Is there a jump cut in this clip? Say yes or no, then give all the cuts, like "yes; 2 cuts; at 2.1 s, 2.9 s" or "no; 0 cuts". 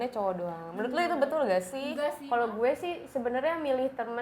yes; 1 cut; at 2.2 s